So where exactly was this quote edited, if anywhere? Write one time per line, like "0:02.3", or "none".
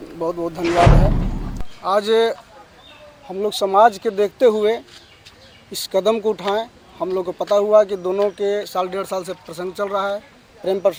none

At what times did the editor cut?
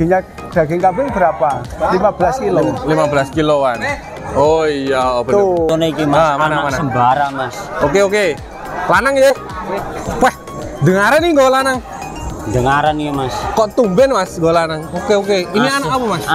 0:05.7

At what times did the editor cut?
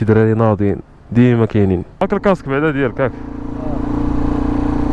0:01.9

